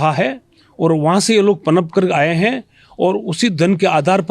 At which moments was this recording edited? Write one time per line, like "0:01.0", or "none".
none